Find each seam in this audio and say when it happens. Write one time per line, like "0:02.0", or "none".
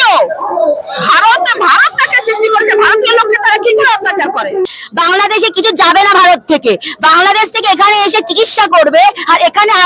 0:04.6